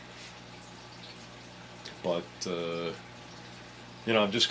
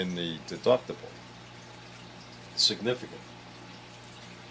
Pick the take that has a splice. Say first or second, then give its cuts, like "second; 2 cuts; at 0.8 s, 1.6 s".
second; 1 cut; at 3.1 s